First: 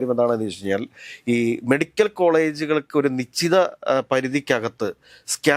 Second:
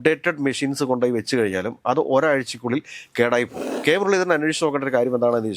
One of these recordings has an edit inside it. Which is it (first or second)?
second